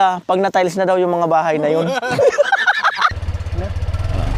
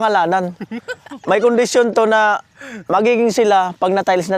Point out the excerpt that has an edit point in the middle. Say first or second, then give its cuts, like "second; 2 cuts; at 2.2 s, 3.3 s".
first; 2 cuts; at 1.8 s, 3.1 s